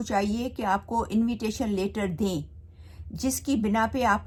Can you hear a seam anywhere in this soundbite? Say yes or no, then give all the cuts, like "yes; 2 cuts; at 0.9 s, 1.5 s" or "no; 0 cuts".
no; 0 cuts